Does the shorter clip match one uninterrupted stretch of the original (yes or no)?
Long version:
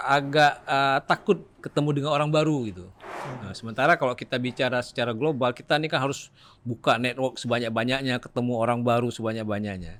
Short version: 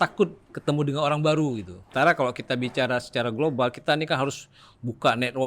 no